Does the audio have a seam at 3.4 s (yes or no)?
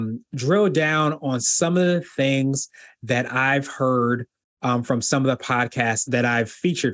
no